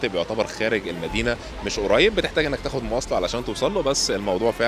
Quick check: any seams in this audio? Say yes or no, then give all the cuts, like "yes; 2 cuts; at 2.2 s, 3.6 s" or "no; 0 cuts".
no; 0 cuts